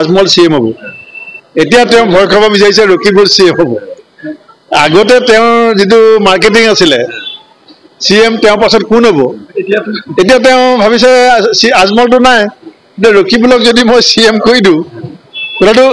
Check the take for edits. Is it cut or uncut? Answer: uncut